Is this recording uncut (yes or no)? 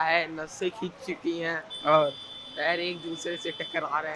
yes